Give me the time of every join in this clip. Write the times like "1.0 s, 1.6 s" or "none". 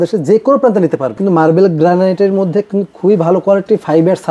1.2 s